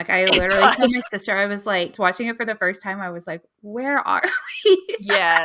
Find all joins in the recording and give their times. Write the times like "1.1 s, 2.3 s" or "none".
1.9 s

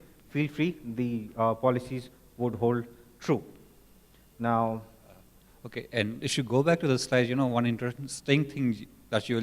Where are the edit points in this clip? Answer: 3.8 s

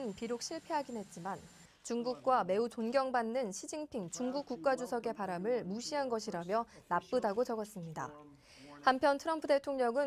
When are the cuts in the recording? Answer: 7.8 s

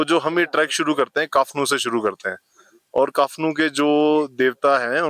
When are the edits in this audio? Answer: none

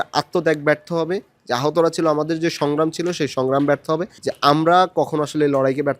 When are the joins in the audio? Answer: 4.2 s

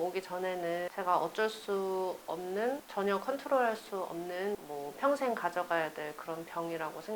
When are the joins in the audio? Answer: none

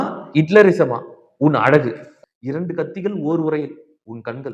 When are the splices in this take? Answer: 2.1 s

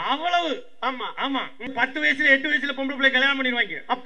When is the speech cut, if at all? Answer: 1.7 s

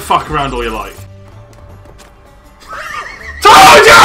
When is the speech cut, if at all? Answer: none

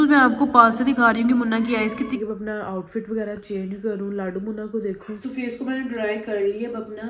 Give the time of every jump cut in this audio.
2.2 s, 5.2 s

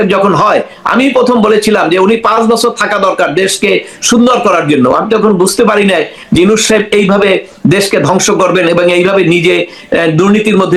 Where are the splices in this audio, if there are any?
none

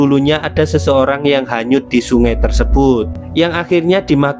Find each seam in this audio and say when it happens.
3.2 s

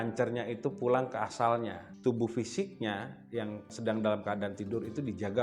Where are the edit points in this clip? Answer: 1.8 s, 3.7 s

